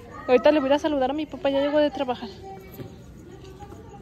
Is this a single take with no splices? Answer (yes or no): yes